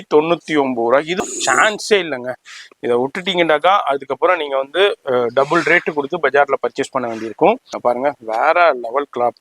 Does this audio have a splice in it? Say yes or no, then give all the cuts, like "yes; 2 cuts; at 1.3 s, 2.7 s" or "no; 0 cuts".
yes; 2 cuts; at 1.2 s, 7.7 s